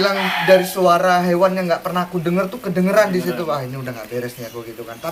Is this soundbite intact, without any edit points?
yes; 0 cuts

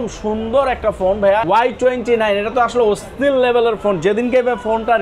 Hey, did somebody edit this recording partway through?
yes; 1 cut; at 1.4 s

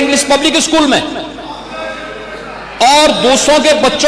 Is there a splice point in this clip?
no; 0 cuts

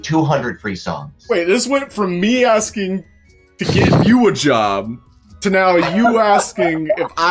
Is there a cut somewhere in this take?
no; 0 cuts

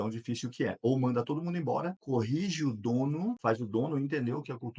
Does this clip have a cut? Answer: yes; 2 cuts; at 2.0 s, 3.4 s

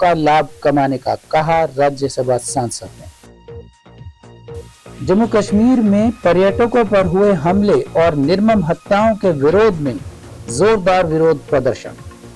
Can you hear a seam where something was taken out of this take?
yes; 1 cut; at 2.9 s

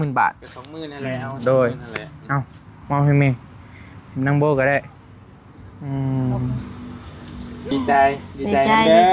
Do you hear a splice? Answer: yes; 1 cut; at 7.7 s

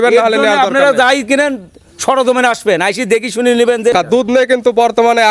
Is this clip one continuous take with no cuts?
no; 1 cut; at 3.9 s

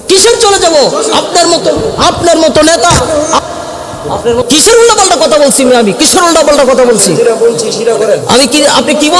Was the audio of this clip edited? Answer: yes; 1 cut; at 4.4 s

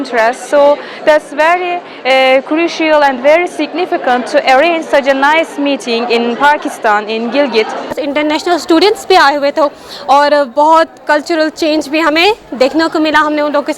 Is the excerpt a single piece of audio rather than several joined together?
no; 1 cut; at 8.0 s

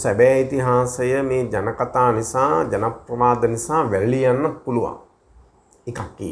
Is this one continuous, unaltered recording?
yes; 0 cuts

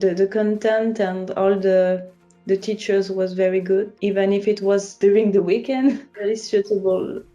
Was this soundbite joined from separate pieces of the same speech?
yes; 3 cuts; at 3.9 s, 4.9 s, 6.1 s

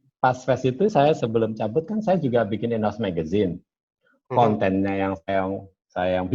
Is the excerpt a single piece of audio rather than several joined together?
yes; 0 cuts

